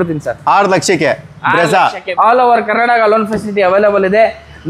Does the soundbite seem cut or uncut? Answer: cut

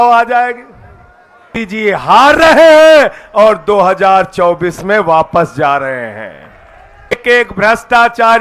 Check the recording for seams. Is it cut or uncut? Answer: cut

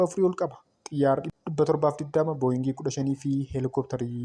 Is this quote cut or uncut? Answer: cut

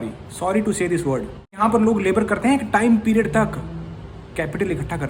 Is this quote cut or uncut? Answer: cut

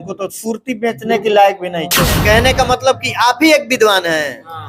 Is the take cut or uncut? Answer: cut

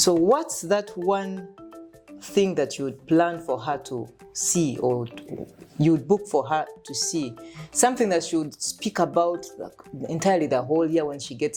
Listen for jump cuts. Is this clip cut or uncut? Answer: uncut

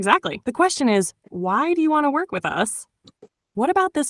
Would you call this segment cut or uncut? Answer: uncut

